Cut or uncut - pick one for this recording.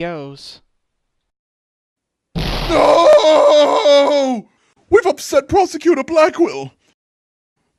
uncut